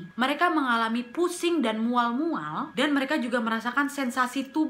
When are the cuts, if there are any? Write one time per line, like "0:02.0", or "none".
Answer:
none